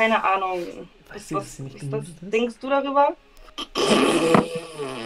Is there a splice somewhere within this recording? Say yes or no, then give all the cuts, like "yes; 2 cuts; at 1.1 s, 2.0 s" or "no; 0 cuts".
no; 0 cuts